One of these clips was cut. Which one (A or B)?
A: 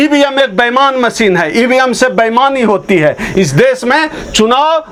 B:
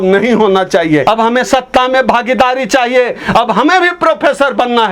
B